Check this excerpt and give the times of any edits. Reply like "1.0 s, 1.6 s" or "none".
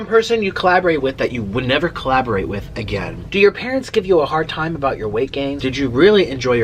3.2 s, 5.6 s